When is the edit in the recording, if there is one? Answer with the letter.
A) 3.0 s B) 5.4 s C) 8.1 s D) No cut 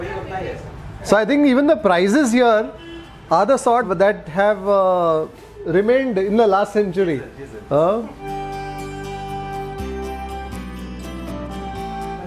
D